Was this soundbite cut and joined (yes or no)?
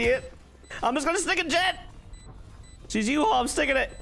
no